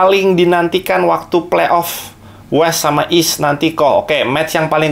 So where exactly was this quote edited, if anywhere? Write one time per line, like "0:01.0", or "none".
none